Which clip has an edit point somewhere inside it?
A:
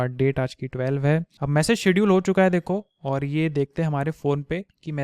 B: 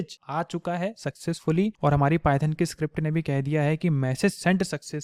A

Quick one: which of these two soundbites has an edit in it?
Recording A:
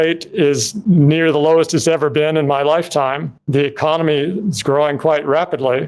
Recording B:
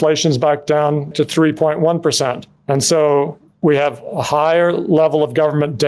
B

